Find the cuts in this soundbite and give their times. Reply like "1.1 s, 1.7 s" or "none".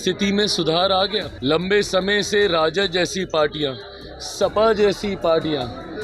1.3 s